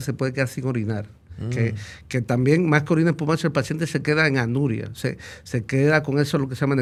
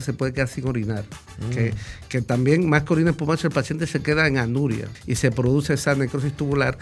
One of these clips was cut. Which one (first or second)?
second